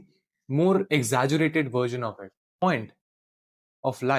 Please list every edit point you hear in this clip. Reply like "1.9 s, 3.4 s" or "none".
2.6 s